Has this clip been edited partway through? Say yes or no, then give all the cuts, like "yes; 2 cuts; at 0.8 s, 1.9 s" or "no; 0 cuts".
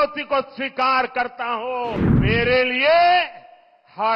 yes; 1 cut; at 2.1 s